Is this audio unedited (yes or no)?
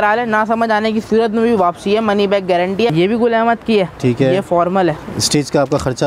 no